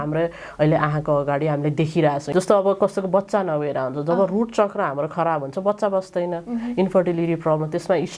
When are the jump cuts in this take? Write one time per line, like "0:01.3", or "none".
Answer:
0:02.2